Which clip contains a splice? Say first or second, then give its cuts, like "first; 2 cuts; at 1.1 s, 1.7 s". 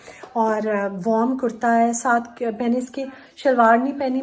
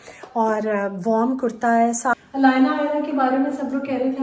second; 1 cut; at 2.1 s